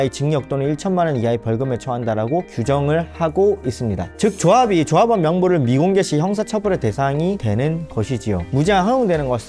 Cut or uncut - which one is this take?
cut